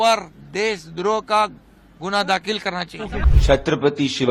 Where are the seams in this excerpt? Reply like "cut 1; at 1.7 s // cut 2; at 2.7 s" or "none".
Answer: cut 1; at 3.3 s